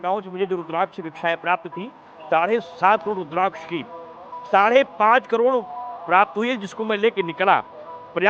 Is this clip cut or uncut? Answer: uncut